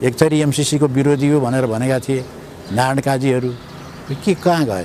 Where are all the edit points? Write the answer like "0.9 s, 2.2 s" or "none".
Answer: none